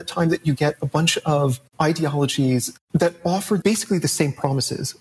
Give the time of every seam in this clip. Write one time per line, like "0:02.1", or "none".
0:01.6